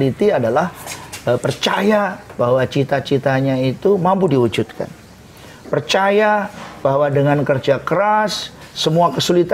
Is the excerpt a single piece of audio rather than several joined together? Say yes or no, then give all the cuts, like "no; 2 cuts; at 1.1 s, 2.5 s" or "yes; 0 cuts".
yes; 0 cuts